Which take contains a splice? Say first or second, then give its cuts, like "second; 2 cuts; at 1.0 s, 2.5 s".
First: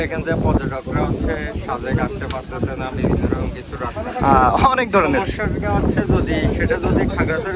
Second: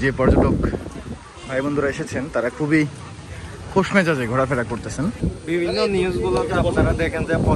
second; 1 cut; at 5.2 s